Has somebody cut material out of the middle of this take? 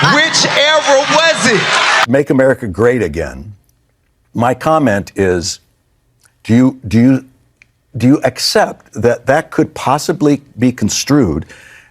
yes; 1 cut; at 2.0 s

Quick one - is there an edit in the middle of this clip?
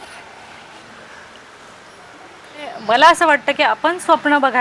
yes; 1 cut; at 2.8 s

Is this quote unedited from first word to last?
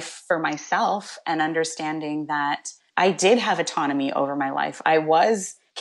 no; 1 cut; at 2.8 s

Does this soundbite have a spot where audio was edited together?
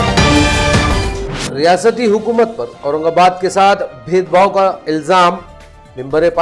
yes; 1 cut; at 1.1 s

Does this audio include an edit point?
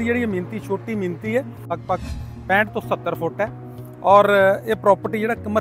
yes; 1 cut; at 1.7 s

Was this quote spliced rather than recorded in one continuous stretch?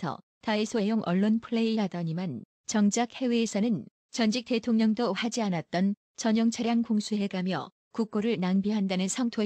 yes; 1 cut; at 8.0 s

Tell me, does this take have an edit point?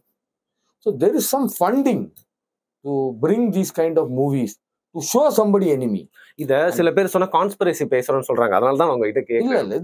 no; 0 cuts

